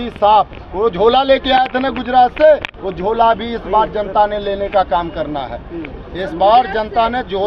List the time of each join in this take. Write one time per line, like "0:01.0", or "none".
none